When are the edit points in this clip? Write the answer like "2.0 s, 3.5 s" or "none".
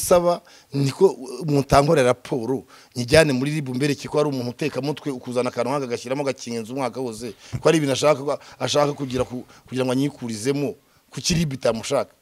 none